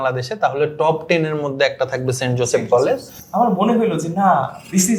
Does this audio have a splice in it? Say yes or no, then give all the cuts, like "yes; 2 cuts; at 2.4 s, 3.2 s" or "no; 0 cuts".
yes; 1 cut; at 3.2 s